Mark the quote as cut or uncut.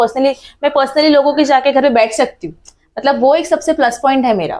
uncut